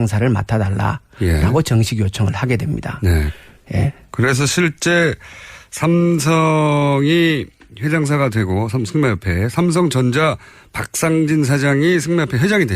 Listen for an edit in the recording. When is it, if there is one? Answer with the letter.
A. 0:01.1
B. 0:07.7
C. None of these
A